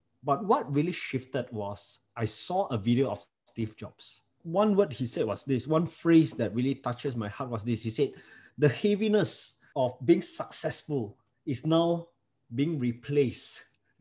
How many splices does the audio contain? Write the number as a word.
two